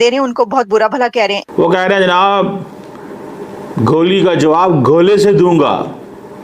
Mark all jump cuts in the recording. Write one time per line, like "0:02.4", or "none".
0:01.4